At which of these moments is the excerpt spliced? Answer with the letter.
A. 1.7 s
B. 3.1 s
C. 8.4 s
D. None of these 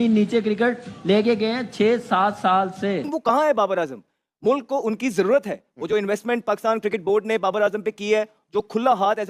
B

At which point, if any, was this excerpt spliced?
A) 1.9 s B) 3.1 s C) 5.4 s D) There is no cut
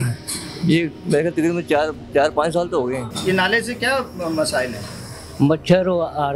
B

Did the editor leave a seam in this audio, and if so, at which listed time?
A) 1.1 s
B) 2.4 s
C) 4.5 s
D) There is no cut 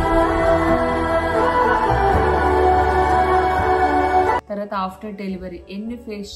C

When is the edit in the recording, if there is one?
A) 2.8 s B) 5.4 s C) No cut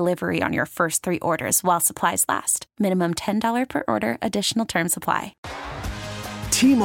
B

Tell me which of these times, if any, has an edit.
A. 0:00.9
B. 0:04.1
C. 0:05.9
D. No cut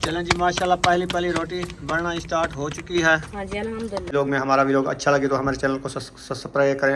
B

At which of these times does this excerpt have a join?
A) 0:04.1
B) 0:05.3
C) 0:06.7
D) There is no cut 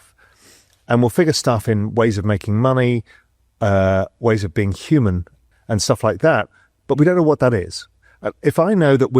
D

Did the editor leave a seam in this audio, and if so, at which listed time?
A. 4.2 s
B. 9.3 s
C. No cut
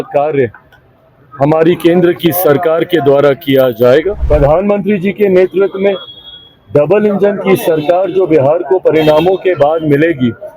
A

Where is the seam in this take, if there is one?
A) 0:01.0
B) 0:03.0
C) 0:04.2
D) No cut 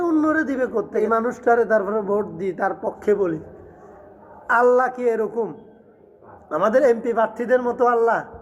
A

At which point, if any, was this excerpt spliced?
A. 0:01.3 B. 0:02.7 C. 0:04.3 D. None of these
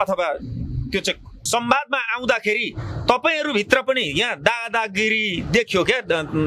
A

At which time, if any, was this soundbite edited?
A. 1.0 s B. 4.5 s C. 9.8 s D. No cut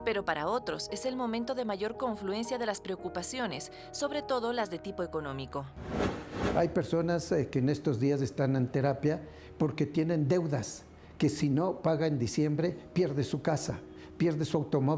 D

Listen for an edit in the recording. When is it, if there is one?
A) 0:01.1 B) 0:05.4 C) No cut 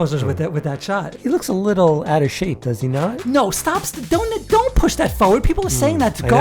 A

